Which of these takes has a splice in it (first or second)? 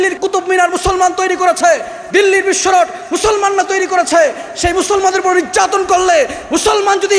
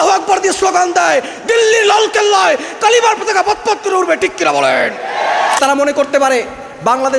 second